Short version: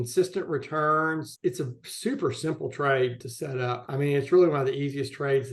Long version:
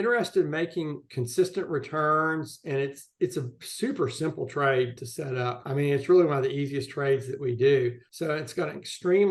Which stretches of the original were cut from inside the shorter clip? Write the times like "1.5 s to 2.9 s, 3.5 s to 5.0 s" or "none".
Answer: 2.5 s to 3.1 s